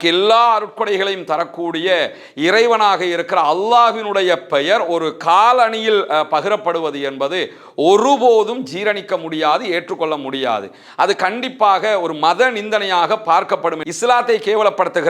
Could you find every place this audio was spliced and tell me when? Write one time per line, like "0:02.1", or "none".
0:13.8